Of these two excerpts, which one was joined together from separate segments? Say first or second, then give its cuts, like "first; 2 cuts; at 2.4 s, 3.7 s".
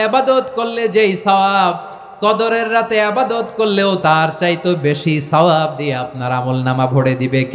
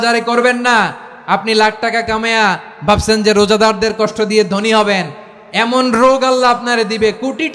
first; 1 cut; at 4.0 s